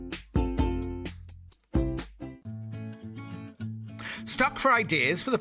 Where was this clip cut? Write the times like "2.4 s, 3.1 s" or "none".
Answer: 2.4 s